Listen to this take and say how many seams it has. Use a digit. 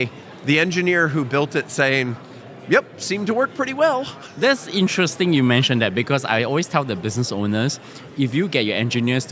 0